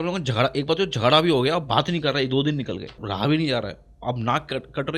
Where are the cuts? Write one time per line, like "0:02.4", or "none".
0:03.0